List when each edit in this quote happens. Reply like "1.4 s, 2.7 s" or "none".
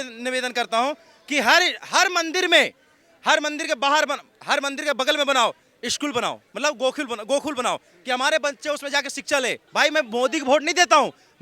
9.6 s